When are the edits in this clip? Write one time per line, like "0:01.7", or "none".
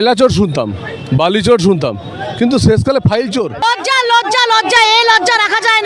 0:03.6

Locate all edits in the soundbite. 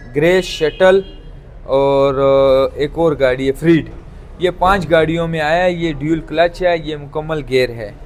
none

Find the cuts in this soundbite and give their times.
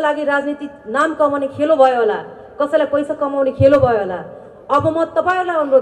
none

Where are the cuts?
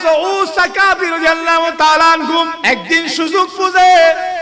0:02.6

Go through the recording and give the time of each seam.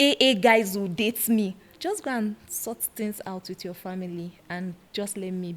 0:01.7

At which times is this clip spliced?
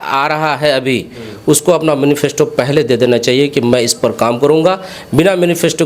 none

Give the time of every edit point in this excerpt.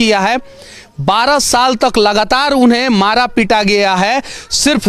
none

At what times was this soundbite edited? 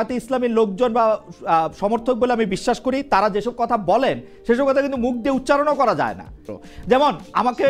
0:06.5

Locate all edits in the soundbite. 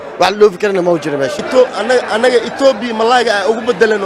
0:01.4

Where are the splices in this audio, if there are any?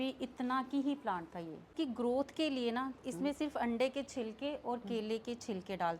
0:01.7

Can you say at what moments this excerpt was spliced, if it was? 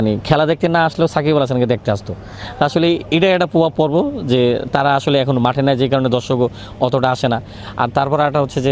none

